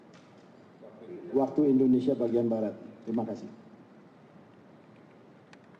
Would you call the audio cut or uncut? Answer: uncut